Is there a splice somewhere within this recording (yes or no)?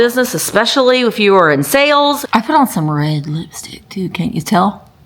yes